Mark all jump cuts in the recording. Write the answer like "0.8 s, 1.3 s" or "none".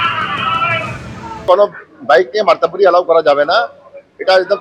1.5 s